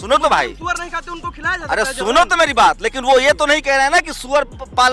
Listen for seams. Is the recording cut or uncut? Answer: uncut